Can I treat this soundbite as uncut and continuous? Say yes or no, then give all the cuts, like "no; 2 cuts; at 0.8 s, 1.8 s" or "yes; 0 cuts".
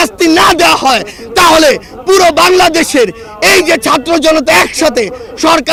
yes; 0 cuts